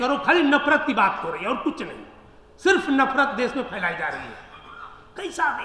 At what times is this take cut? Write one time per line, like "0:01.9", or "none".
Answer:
none